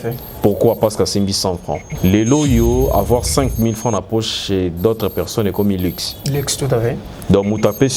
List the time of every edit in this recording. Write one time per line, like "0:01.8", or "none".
0:01.9